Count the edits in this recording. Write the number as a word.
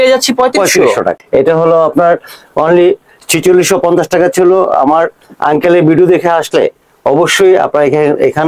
one